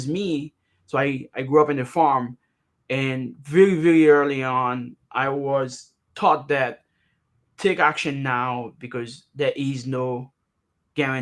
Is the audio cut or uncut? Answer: uncut